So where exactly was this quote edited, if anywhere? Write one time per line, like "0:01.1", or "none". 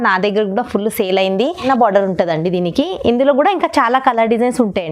0:01.6